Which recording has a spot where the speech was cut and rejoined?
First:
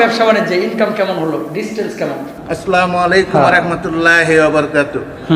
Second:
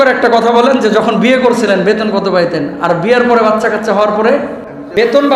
first; 1 cut; at 2.4 s

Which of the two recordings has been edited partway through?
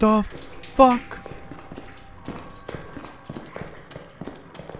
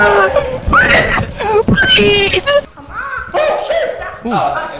second; 1 cut; at 2.6 s

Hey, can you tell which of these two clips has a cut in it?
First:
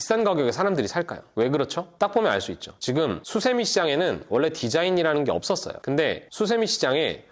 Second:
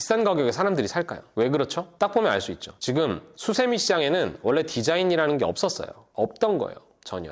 first; 2 cuts; at 3.2 s, 6.0 s

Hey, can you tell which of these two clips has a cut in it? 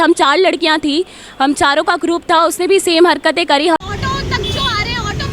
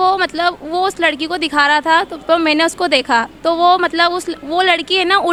first; 1 cut; at 3.8 s

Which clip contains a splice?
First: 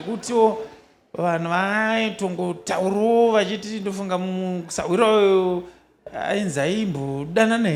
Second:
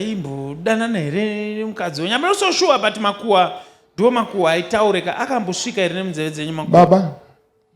second; 1 cut; at 6.6 s

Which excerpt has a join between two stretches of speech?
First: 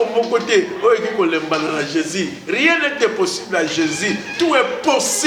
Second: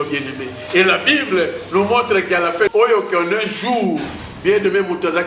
second; 1 cut; at 2.7 s

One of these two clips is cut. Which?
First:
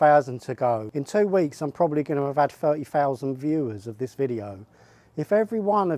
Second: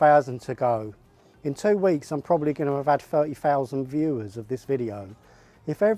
first; 1 cut; at 0.9 s

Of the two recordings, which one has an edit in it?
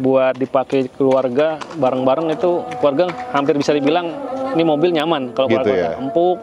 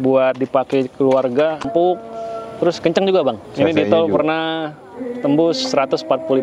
second; 2 cuts; at 1.6 s, 3.4 s

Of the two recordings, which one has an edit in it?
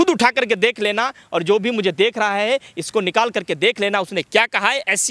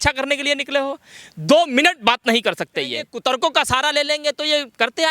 second; 1 cut; at 3.1 s

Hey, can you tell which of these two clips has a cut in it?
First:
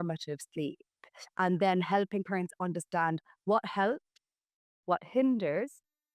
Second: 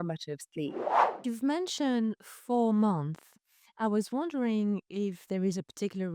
second; 1 cut; at 1.2 s

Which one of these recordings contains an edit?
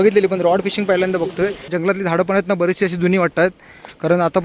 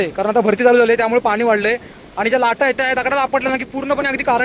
first; 1 cut; at 1.7 s

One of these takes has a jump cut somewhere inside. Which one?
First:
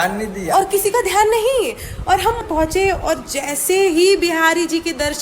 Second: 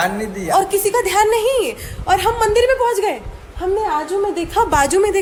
first; 1 cut; at 2.4 s

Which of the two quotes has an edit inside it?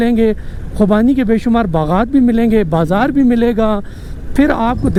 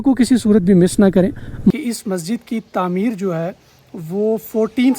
second; 1 cut; at 1.7 s

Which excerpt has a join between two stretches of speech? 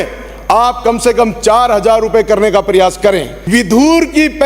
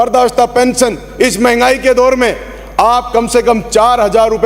first; 1 cut; at 3.3 s

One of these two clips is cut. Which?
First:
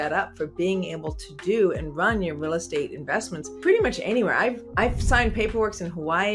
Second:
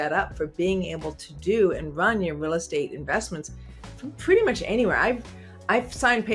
first; 2 cuts; at 3.4 s, 4.6 s

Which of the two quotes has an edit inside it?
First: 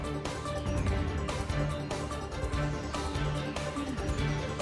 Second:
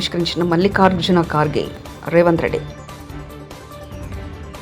first; 1 cut; at 1.4 s

